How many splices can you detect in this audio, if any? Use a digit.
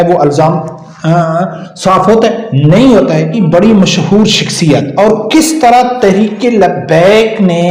1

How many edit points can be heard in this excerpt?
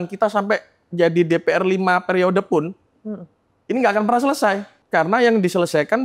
1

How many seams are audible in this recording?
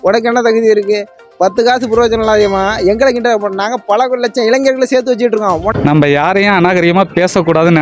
1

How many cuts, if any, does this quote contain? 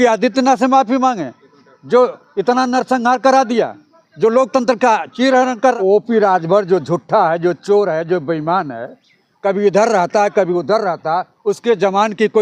1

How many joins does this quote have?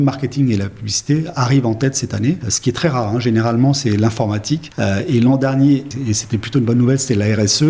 3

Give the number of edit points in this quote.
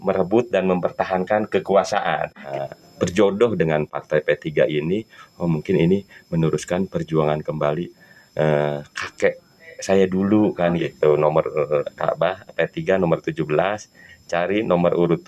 2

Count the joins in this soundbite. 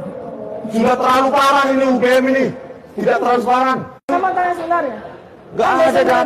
1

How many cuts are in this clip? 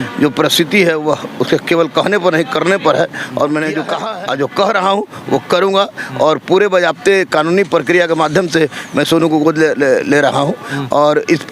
1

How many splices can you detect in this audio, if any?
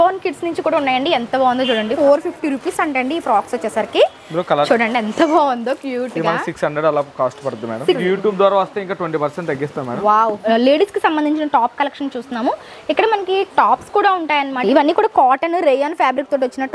5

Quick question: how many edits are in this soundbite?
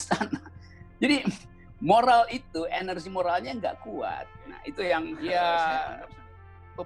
1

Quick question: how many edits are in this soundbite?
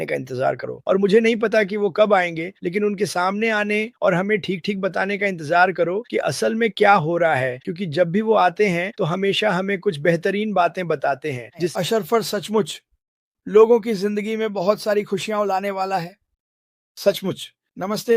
1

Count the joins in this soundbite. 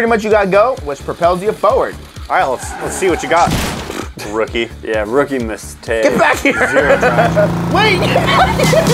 2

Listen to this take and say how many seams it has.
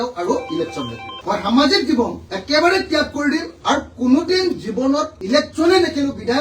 1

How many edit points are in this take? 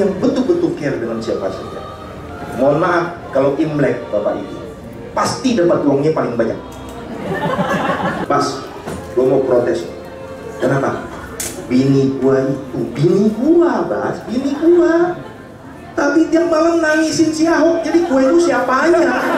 2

